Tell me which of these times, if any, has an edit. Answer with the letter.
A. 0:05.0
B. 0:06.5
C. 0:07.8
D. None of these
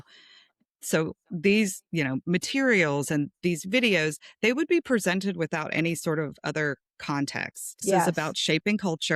C